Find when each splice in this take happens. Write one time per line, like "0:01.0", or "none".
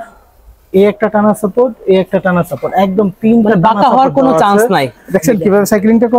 0:05.0